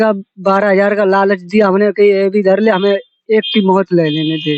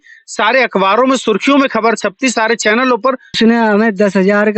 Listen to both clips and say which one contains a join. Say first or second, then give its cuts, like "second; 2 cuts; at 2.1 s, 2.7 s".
second; 1 cut; at 3.4 s